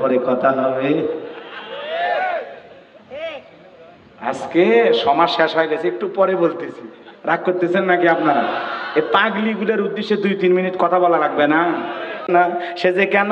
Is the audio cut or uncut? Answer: cut